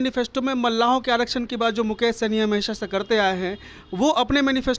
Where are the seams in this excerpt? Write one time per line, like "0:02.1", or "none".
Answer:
none